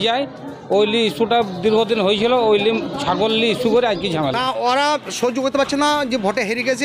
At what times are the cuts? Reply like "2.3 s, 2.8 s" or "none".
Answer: 4.4 s